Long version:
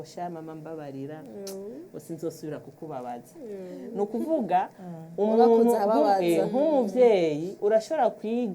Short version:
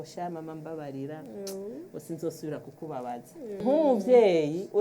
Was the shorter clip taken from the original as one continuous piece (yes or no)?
no